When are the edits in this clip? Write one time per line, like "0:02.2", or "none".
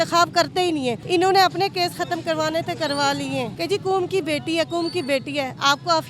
0:01.0
0:03.5